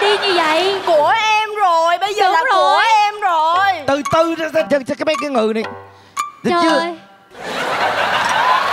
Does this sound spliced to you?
no; 0 cuts

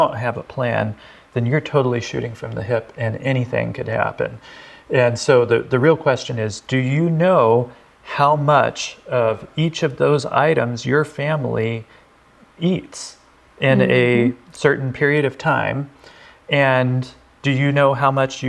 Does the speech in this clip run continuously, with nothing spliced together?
yes; 0 cuts

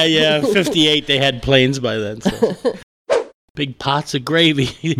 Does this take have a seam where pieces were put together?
yes; 1 cut; at 2.9 s

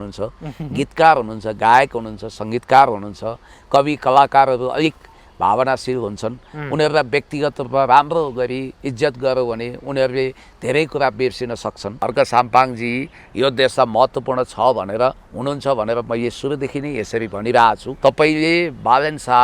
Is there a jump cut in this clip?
yes; 2 cuts; at 12.0 s, 17.9 s

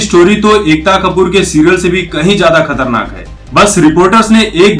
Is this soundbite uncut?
no; 1 cut; at 3.2 s

